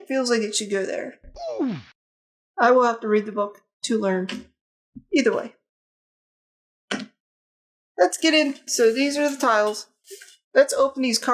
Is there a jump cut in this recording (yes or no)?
no